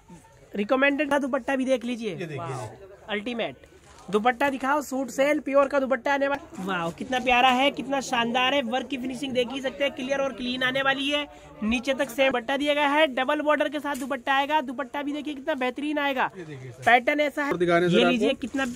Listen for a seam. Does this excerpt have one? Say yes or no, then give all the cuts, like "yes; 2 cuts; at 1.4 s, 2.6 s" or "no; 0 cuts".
yes; 4 cuts; at 1.1 s, 6.4 s, 12.3 s, 17.5 s